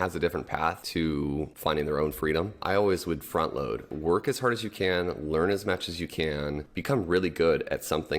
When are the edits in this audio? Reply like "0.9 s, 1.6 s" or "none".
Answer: 1.3 s, 2.6 s, 3.9 s, 6.7 s